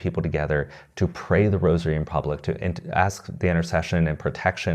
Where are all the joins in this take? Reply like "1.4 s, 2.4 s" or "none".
none